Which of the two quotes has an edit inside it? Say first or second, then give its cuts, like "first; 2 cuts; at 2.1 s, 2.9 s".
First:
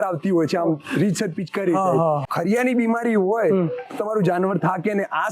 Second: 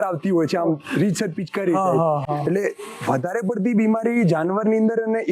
first; 1 cut; at 2.3 s